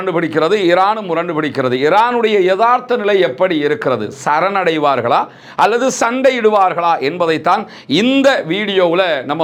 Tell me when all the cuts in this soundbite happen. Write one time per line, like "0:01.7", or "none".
none